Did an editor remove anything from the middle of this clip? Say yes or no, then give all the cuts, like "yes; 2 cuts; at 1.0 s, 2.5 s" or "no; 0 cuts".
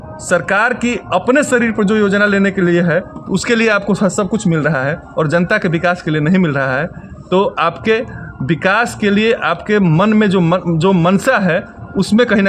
no; 0 cuts